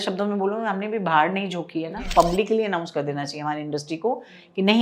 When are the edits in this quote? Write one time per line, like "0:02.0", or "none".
0:02.1